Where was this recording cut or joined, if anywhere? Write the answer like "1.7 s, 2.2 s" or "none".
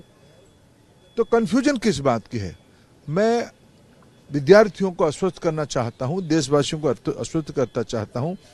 none